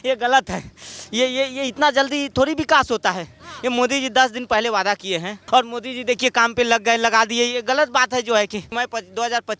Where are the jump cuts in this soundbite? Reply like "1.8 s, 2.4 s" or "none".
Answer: 5.3 s, 8.7 s